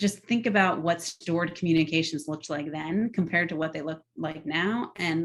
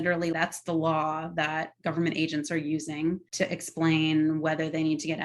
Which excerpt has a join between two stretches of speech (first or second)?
second